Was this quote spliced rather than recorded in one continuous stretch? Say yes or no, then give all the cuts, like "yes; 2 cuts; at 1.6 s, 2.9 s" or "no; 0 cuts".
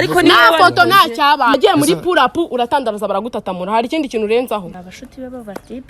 yes; 2 cuts; at 1.5 s, 4.8 s